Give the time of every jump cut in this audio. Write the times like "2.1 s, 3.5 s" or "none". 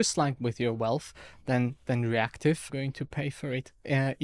2.7 s